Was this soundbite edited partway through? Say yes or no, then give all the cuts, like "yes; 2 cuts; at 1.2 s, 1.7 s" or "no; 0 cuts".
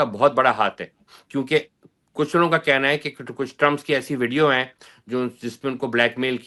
no; 0 cuts